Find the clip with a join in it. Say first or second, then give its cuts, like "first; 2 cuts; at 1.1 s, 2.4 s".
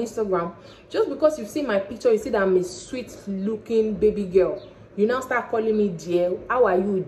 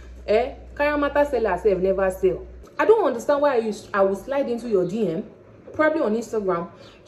second; 1 cut; at 2.5 s